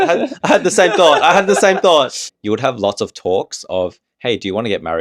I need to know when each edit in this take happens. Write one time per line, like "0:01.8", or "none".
0:02.3